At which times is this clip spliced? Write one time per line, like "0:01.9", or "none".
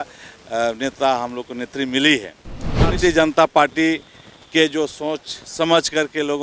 0:03.0

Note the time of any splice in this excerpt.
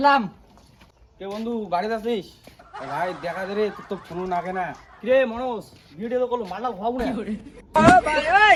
none

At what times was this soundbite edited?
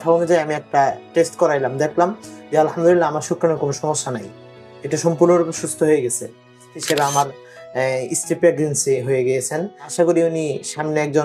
0:06.8
0:09.9

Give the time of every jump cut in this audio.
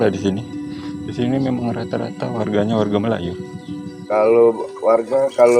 0:03.9

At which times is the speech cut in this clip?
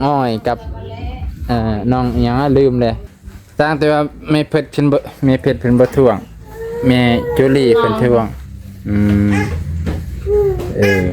0:03.1

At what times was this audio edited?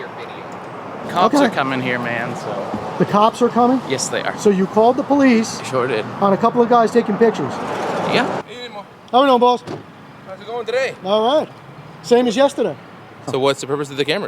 0:01.0
0:08.4
0:13.3

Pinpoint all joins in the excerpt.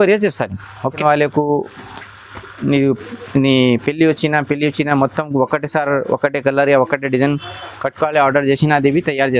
0:00.9

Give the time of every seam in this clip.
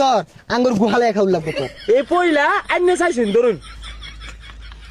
0:01.6

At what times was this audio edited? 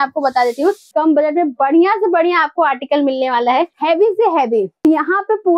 0:00.9
0:03.7
0:04.8

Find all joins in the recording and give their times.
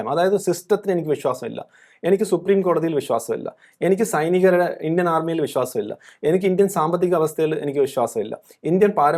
none

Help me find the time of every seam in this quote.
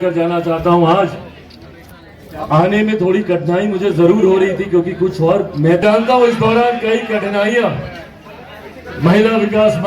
0:05.8

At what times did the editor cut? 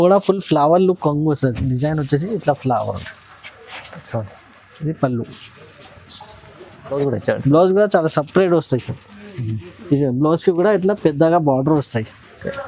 0:07.0

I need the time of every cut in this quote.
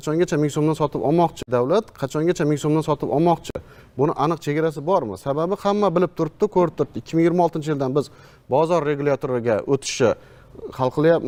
none

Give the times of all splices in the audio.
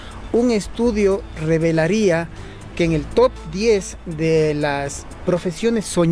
none

